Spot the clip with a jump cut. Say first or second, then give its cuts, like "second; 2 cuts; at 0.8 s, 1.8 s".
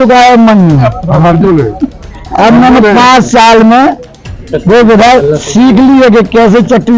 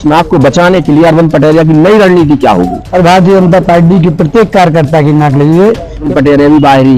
second; 2 cuts; at 2.8 s, 6.1 s